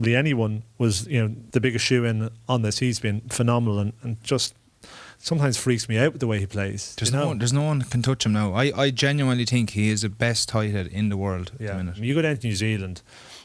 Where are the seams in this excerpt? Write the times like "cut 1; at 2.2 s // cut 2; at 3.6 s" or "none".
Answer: cut 1; at 1.4 s // cut 2; at 12.0 s